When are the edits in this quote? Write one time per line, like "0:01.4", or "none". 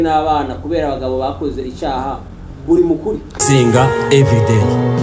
0:03.4

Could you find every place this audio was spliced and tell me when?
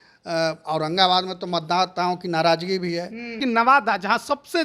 0:03.4

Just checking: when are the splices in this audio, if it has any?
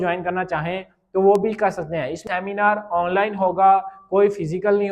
0:02.2

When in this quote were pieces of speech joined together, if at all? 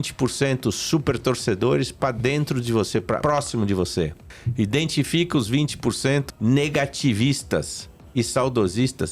0:03.2
0:06.2

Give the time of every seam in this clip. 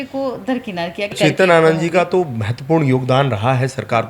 0:01.1

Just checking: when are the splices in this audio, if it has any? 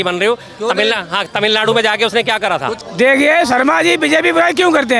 0:02.8

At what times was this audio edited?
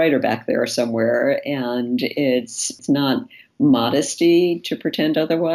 0:02.8

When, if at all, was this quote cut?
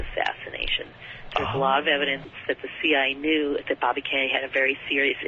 0:02.3

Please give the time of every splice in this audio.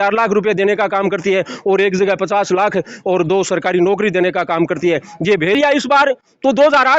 0:05.6

